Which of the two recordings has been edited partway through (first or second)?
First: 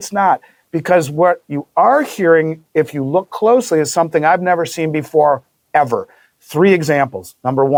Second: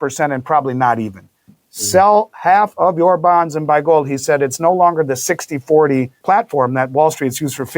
second